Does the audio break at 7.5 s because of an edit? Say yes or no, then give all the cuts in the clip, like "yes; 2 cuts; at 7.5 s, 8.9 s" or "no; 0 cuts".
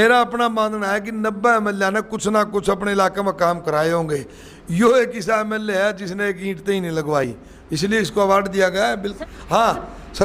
no; 0 cuts